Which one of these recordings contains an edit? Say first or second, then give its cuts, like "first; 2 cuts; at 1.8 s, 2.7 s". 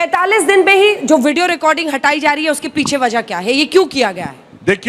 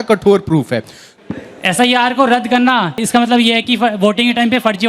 second; 2 cuts; at 1.1 s, 3.0 s